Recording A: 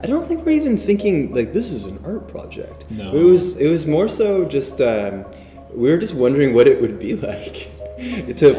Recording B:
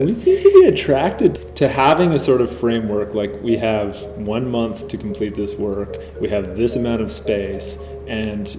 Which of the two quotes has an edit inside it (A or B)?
B